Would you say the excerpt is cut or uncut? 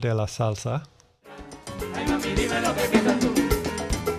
uncut